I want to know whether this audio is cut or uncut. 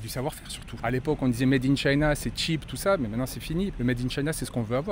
cut